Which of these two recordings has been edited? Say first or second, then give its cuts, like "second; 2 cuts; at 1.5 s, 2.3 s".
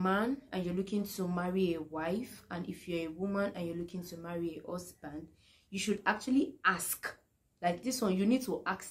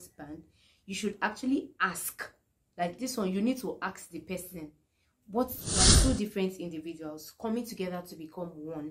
second; 1 cut; at 5.9 s